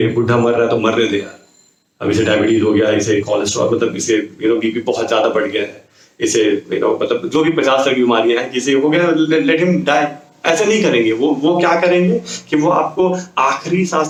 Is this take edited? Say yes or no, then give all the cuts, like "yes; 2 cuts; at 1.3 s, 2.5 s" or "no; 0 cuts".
no; 0 cuts